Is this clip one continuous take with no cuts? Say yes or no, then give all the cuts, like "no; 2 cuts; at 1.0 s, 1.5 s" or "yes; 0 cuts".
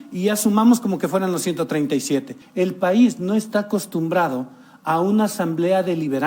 no; 1 cut; at 2.4 s